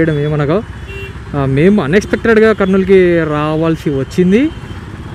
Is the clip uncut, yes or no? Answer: yes